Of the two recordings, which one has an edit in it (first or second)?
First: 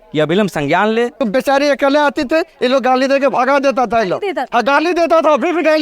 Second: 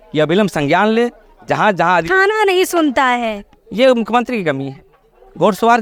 first